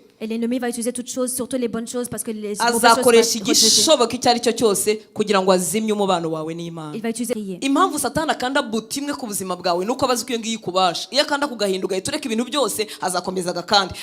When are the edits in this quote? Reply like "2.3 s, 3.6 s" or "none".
7.3 s